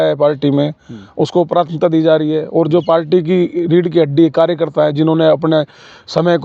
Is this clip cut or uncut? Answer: uncut